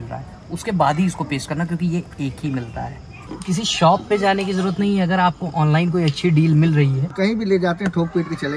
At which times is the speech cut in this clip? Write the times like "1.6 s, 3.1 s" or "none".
3.2 s, 7.0 s